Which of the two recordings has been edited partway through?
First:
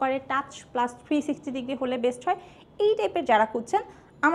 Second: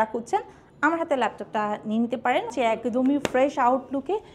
second; 1 cut; at 2.5 s

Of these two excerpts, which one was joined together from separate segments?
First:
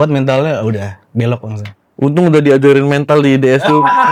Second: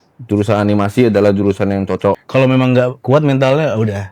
second; 1 cut; at 2.2 s

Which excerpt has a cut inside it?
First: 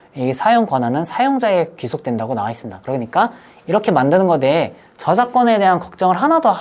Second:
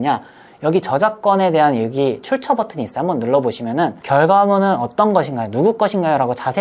second; 1 cut; at 4.0 s

